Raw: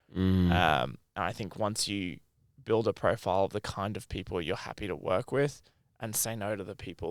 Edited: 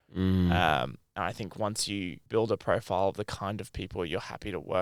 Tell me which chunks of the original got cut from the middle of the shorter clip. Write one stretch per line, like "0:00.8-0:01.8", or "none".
0:02.2-0:02.5